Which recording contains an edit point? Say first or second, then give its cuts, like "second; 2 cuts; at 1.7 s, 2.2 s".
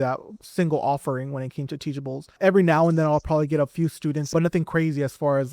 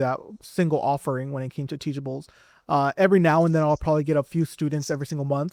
first; 2 cuts; at 2.4 s, 4.3 s